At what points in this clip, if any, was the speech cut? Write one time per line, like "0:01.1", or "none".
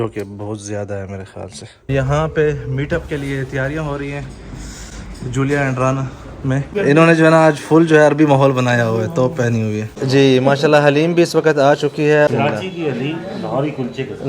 0:01.9
0:06.7
0:09.9
0:12.3

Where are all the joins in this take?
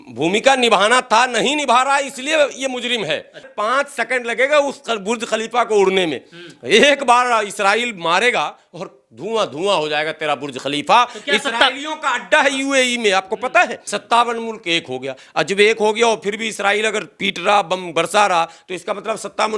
0:03.5
0:13.9

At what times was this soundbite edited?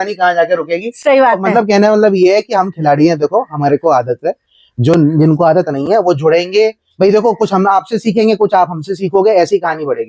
none

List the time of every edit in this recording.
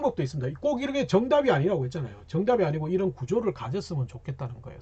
none

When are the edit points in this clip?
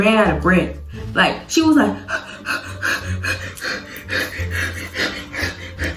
none

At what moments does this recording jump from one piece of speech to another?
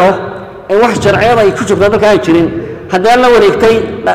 none

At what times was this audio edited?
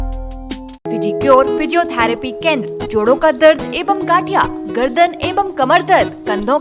0:01.1

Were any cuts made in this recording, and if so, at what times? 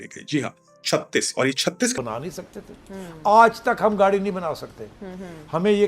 0:01.9

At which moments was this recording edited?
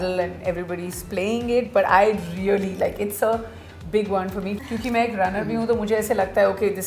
0:04.6

